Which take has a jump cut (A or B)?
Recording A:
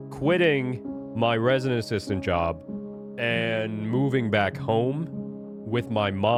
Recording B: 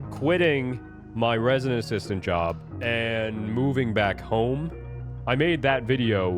B